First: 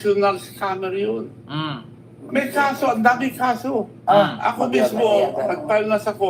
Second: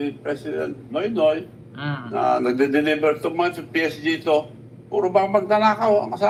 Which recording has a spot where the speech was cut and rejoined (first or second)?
first